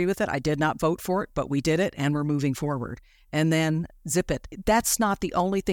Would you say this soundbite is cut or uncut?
cut